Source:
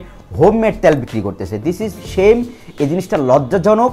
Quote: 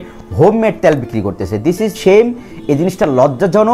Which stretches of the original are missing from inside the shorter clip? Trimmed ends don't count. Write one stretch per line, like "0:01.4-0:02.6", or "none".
0:01.9-0:02.1